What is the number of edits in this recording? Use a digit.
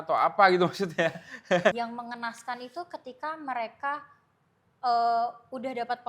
1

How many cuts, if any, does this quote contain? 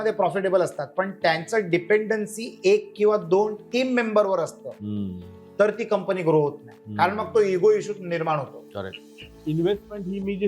1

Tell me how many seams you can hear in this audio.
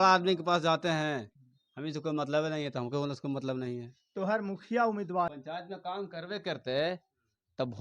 1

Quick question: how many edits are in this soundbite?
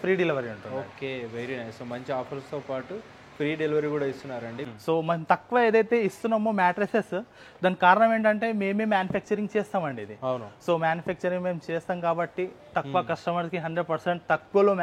1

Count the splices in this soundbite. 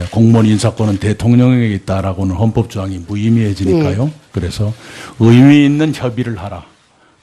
0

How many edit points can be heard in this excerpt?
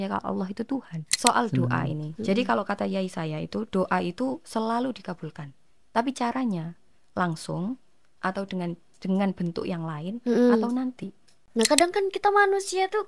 2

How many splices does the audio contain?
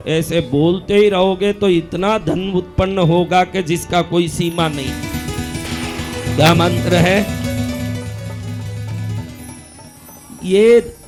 0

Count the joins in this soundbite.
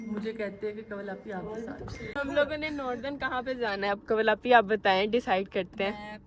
1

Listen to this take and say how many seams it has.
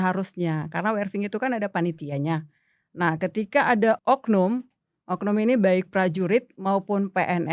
1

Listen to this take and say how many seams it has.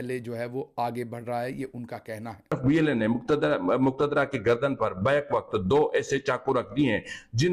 0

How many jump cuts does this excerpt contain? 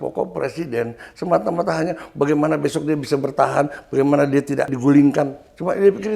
1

